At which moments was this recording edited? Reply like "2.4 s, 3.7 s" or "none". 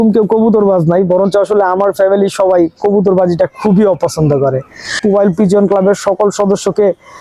5.0 s